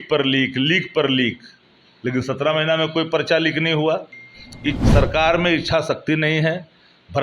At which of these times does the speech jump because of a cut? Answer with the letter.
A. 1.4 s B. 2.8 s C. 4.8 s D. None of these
C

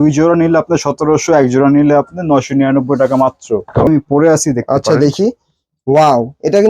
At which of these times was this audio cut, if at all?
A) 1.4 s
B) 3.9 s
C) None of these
B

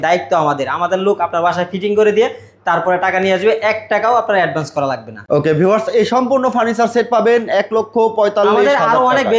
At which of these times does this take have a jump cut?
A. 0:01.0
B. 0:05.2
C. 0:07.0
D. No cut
D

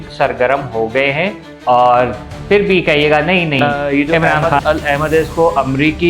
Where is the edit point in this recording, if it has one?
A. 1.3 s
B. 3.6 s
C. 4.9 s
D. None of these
B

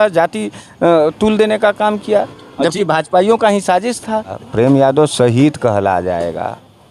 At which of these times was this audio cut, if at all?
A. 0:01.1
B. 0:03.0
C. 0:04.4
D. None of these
C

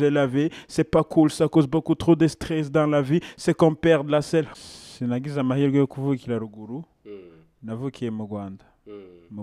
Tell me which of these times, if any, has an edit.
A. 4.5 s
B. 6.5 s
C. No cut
A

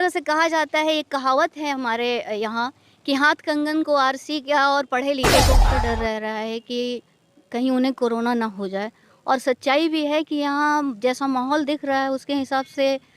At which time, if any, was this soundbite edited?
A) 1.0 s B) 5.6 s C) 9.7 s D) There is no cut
B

